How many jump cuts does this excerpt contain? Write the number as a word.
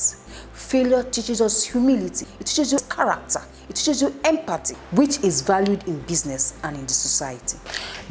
one